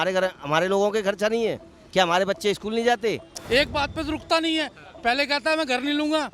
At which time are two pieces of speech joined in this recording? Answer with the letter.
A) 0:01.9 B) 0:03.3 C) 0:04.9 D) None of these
B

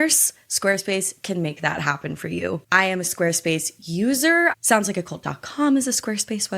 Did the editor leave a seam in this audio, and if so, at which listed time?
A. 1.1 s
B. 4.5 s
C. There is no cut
B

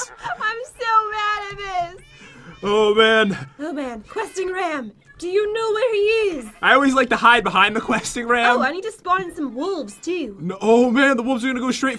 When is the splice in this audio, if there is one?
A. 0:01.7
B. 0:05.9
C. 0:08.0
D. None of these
C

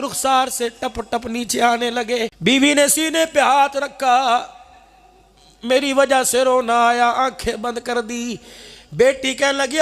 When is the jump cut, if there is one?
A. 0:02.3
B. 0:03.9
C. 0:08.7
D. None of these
A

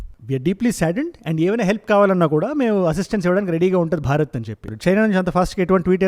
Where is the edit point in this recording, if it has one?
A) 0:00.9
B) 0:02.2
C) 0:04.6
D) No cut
D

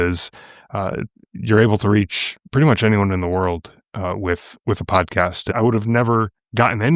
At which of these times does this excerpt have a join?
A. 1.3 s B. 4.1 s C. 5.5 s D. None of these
C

